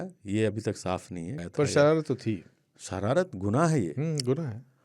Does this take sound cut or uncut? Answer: cut